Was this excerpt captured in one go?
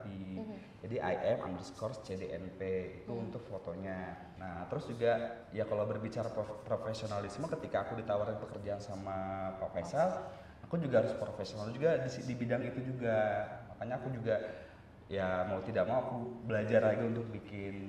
no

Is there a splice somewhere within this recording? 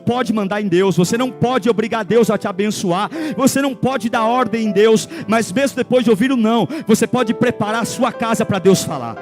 yes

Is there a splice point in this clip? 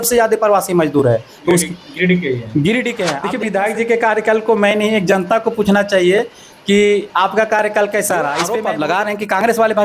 yes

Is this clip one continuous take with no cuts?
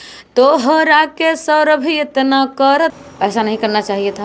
no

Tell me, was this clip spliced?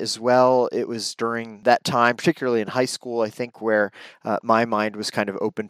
yes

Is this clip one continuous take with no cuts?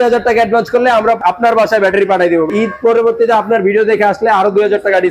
no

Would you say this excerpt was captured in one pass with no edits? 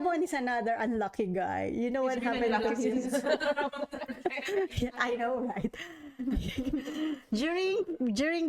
yes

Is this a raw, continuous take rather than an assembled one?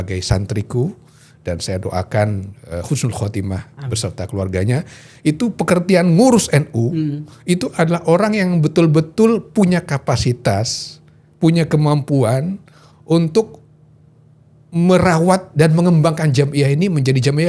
yes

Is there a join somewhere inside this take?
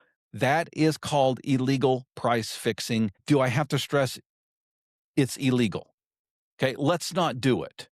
yes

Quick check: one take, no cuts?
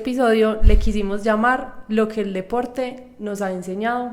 yes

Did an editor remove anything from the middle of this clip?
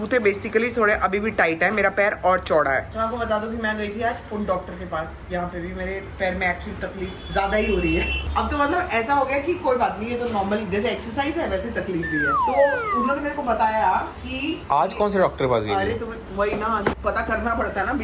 no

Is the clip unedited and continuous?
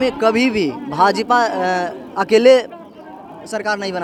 yes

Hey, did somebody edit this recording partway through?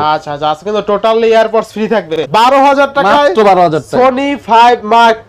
yes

